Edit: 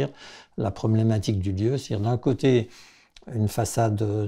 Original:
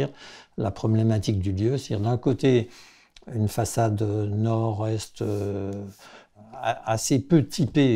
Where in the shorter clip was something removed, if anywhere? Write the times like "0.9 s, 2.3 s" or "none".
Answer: none